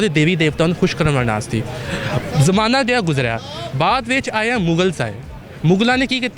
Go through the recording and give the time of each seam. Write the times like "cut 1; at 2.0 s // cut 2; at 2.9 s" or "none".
none